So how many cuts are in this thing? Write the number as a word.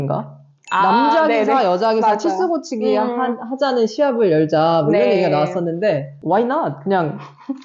zero